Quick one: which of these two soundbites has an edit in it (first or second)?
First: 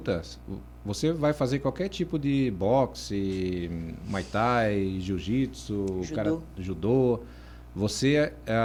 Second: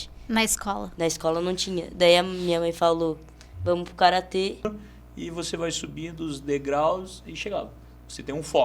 second